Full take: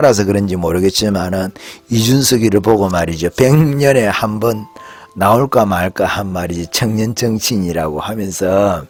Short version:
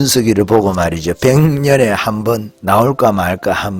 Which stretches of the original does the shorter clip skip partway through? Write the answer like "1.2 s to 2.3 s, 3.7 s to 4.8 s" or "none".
4.7 s to 5.1 s